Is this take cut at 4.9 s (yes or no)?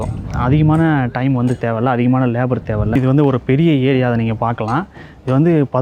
no